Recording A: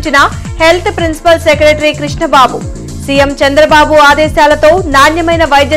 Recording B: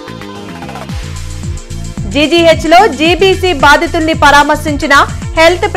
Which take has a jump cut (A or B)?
B